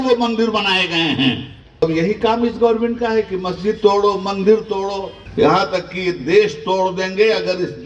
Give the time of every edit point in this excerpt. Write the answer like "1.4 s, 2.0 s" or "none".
1.8 s, 5.2 s